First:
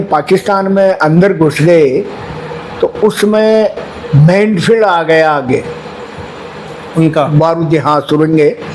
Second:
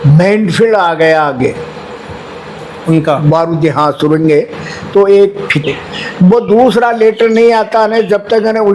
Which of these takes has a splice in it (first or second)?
second